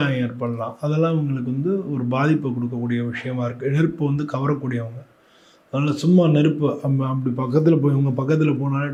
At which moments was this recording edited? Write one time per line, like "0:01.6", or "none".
none